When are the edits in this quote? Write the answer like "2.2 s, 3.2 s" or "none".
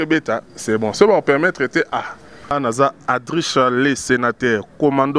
2.5 s